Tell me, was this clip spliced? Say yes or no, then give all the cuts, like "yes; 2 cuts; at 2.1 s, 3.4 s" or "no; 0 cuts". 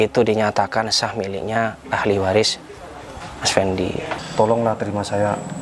yes; 1 cut; at 4.2 s